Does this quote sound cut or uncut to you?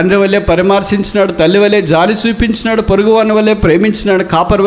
uncut